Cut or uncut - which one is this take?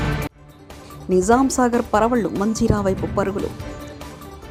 uncut